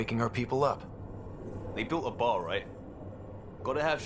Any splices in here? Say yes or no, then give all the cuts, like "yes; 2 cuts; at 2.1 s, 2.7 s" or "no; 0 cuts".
no; 0 cuts